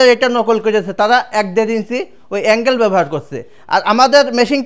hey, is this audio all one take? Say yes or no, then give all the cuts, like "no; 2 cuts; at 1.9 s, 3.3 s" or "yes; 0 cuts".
yes; 0 cuts